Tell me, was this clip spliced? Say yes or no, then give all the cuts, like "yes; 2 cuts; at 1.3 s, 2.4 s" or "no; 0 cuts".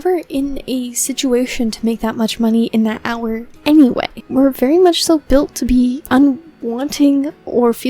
yes; 3 cuts; at 3.5 s, 4.2 s, 6.0 s